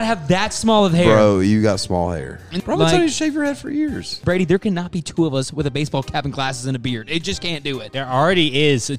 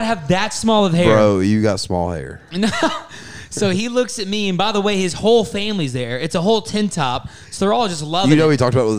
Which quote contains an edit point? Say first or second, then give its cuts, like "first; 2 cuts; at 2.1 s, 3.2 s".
first; 3 cuts; at 2.4 s, 4.1 s, 7.9 s